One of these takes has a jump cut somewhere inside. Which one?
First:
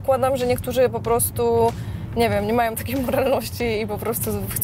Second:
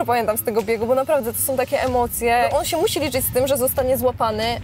second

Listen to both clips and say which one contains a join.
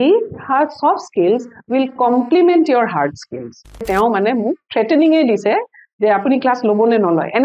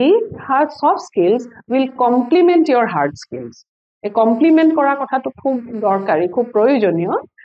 first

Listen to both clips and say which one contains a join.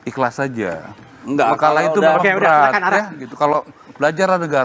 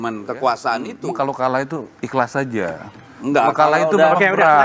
second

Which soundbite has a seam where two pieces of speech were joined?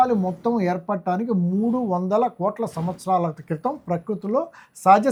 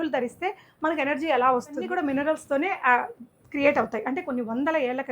second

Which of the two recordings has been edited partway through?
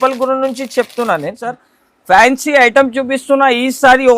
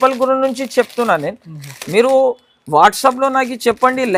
first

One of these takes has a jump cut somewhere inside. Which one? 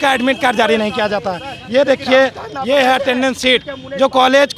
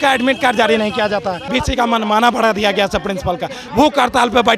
second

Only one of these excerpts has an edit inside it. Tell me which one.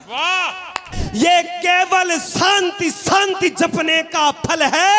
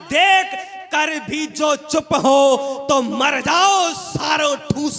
first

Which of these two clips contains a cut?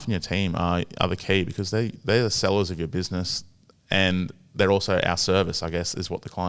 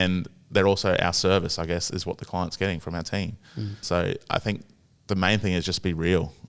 second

